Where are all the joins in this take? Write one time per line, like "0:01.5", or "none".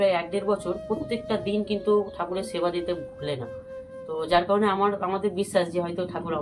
none

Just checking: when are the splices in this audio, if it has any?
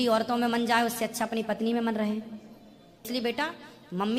0:03.1

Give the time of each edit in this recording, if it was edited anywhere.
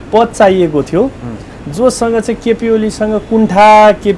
none

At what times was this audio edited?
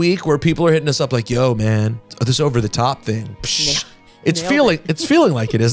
none

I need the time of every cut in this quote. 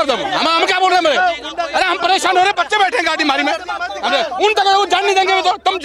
none

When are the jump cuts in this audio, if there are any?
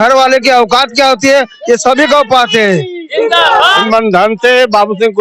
0:03.8

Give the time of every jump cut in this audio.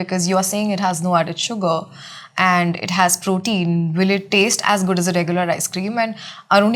none

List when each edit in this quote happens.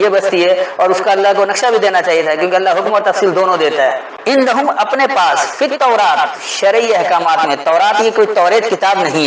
0:04.1

